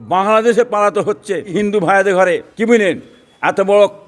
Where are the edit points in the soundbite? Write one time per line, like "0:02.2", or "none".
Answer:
0:01.5
0:02.5